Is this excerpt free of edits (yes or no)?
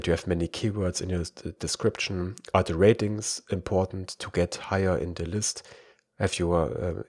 yes